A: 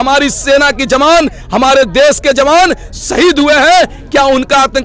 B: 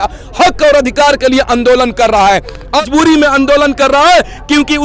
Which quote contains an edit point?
B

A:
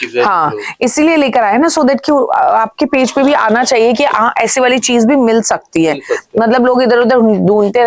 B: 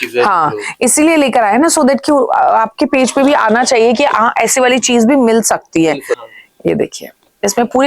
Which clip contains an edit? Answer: B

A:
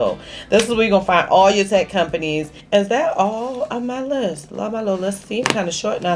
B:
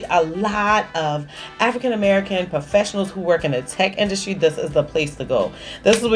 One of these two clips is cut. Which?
A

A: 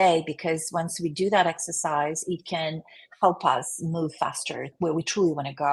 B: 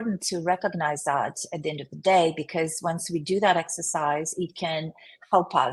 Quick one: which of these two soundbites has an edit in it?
A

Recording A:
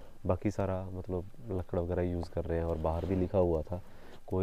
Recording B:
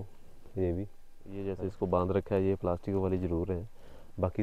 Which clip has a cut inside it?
B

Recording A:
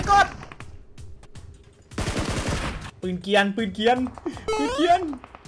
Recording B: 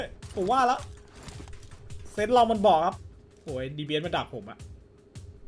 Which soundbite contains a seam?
B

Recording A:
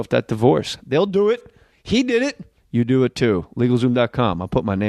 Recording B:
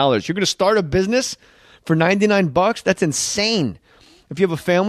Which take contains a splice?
B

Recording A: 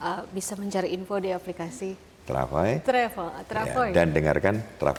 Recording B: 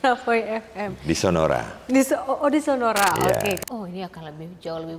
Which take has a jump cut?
B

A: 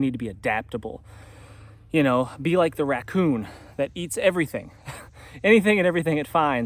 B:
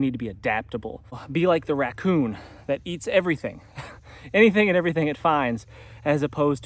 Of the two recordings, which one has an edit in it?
B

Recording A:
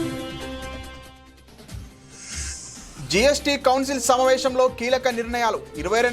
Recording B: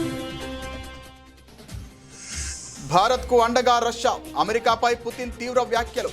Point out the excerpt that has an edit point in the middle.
B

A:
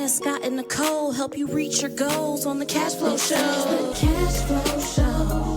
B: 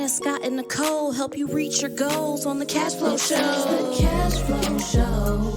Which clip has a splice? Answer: A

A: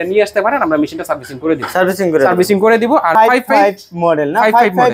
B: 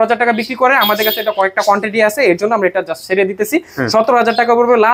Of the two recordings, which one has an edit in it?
A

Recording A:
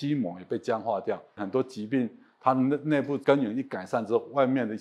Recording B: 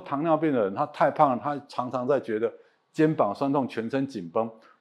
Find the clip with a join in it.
A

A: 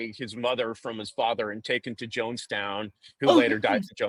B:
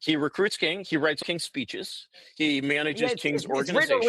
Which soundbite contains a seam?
B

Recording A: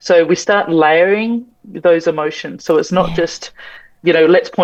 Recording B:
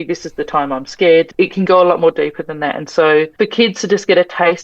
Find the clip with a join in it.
B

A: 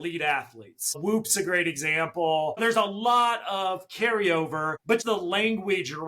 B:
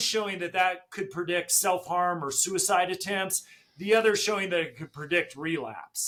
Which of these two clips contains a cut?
A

